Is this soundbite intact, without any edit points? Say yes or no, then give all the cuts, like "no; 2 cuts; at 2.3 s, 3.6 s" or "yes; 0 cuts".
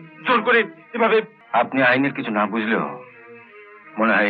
no; 1 cut; at 1.4 s